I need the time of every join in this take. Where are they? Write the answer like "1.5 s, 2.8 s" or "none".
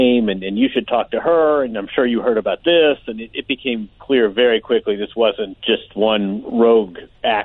5.5 s